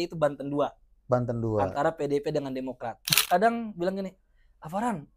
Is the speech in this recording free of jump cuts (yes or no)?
no